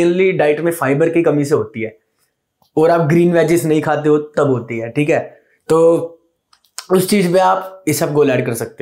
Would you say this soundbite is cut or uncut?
uncut